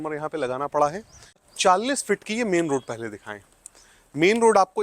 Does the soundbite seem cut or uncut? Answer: cut